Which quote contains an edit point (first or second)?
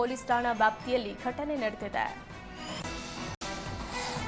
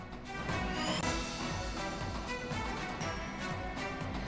first